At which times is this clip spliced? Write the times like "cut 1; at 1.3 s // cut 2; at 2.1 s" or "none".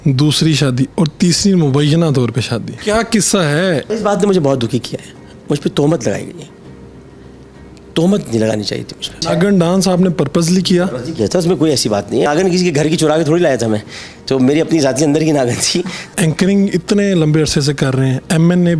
cut 1; at 2.7 s // cut 2; at 3.9 s // cut 3; at 9.1 s // cut 4; at 12.3 s // cut 5; at 16.1 s